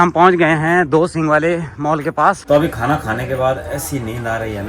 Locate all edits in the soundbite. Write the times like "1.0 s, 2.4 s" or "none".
2.4 s